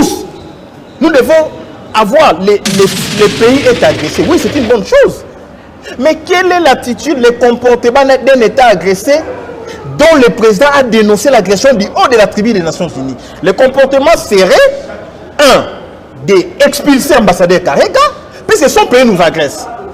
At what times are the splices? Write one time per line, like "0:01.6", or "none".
0:03.2